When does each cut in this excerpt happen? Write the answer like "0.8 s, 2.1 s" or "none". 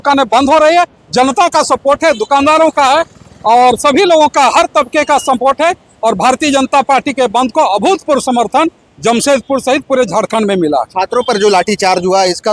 none